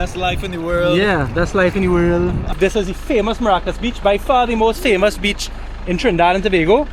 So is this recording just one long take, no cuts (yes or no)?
no